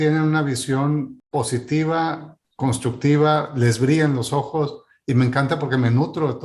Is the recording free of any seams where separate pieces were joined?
no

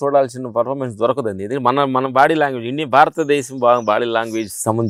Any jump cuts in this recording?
no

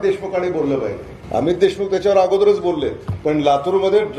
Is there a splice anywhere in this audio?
yes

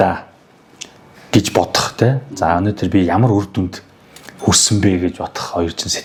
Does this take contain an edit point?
no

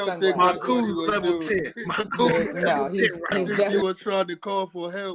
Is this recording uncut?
no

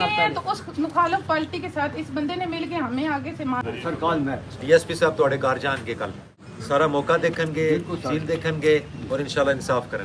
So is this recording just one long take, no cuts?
no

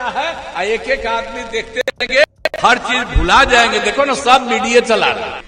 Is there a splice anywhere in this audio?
no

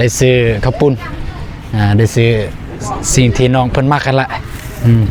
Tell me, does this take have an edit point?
no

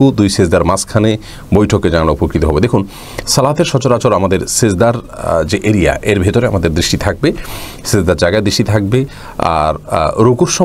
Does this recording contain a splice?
no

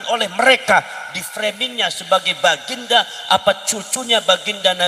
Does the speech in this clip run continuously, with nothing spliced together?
yes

